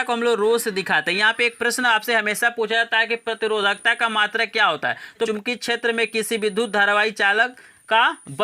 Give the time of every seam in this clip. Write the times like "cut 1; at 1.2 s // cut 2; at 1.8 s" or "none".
cut 1; at 5.3 s